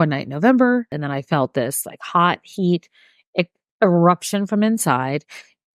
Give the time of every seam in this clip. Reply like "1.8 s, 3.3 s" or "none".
1.0 s